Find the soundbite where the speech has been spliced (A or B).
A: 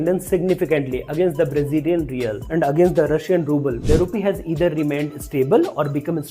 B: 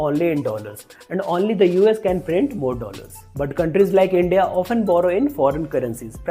A